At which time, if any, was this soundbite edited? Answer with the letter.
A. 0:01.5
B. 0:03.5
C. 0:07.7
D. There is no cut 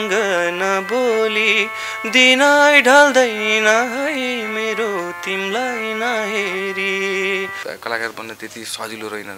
C